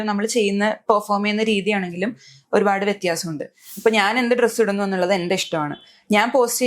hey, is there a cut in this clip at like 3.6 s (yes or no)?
yes